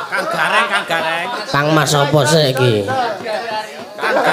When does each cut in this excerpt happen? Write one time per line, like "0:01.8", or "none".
none